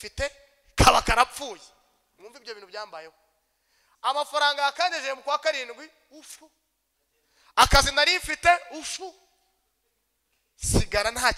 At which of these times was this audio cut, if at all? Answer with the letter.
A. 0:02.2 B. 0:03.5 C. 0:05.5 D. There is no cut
D